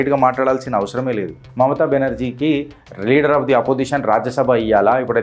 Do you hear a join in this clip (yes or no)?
yes